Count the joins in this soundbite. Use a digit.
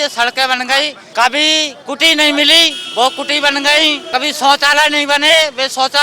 3